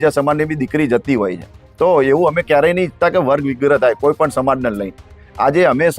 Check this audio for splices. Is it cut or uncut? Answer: uncut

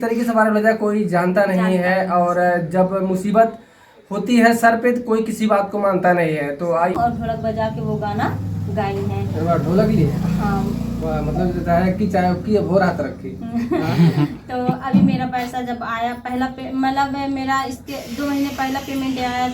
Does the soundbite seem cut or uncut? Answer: cut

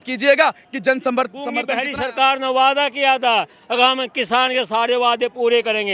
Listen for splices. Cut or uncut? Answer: cut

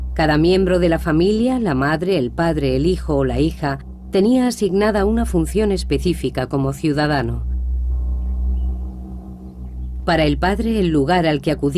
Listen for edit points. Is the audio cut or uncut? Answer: uncut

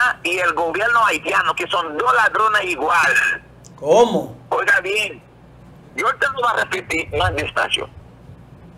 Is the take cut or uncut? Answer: uncut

